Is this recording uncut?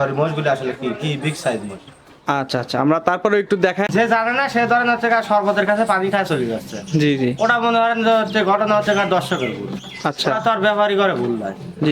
no; 1 cut; at 3.9 s

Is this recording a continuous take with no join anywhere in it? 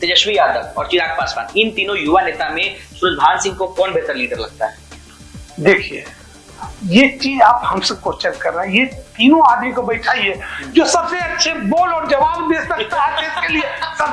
yes; 0 cuts

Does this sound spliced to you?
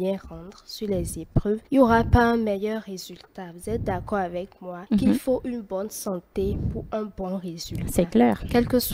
no; 0 cuts

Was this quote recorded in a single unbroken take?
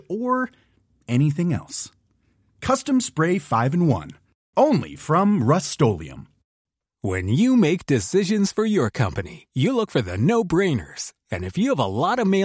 yes; 0 cuts

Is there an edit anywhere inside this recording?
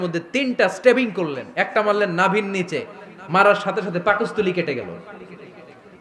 no; 0 cuts

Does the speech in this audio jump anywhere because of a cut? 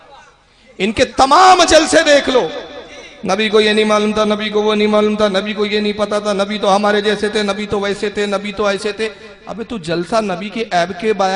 no; 0 cuts

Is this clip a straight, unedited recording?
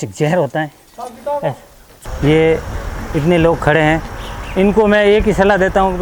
no; 1 cut; at 1.9 s

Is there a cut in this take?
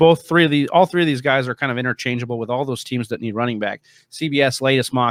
no; 0 cuts

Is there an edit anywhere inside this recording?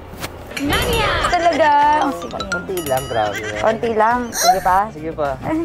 yes; 2 cuts; at 1.3 s, 4.3 s

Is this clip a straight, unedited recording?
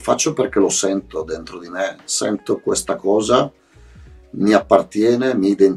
yes; 0 cuts

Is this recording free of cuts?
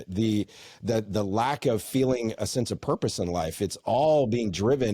yes; 0 cuts

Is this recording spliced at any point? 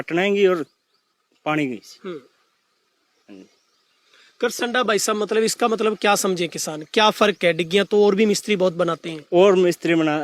no; 0 cuts

